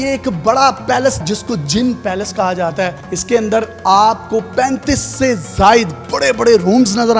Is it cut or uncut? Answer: cut